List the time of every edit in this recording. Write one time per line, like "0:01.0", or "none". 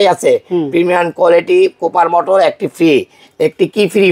none